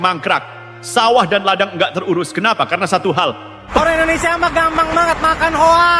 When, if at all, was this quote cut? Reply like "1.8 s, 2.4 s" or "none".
3.8 s